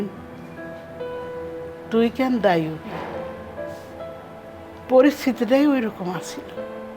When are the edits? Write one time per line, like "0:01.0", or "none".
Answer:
0:04.1